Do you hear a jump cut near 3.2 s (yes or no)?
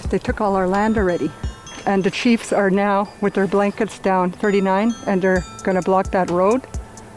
no